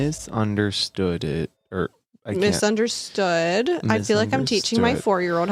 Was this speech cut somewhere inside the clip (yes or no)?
no